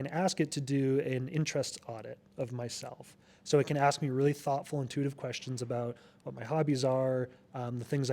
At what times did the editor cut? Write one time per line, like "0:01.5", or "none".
none